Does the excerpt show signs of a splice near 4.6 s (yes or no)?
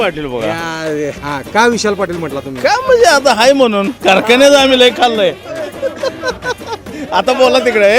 no